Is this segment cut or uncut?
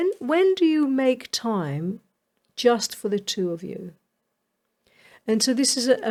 uncut